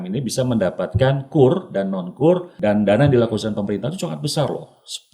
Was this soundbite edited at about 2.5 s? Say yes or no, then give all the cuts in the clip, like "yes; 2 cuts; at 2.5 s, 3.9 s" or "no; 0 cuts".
yes; 1 cut; at 2.5 s